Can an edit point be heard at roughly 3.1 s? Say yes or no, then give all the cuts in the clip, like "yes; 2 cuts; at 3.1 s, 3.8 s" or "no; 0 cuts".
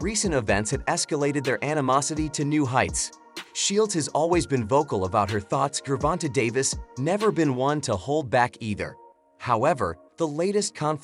yes; 1 cut; at 3.1 s